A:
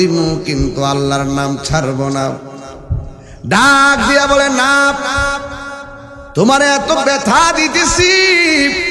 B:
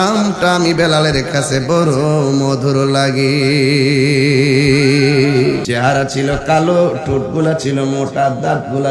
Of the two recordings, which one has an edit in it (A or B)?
B